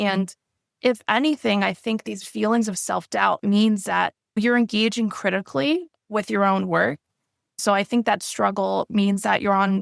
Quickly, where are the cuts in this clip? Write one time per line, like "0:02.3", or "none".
0:04.4
0:07.6